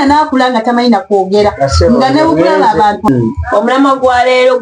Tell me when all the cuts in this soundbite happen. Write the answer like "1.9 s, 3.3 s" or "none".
3.1 s